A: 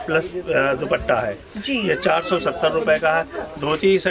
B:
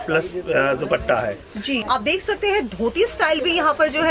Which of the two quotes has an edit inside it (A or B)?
B